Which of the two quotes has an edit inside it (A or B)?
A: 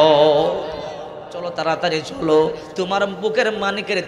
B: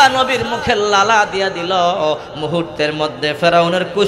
A